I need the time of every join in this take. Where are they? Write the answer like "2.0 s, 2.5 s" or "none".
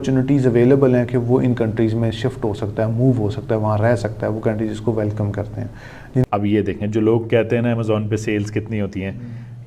6.2 s